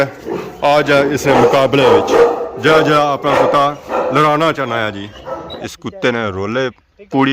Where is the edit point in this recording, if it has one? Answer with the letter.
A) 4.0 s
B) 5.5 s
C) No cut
B